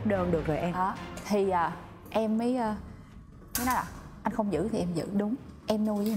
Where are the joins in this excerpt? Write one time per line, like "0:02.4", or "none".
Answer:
none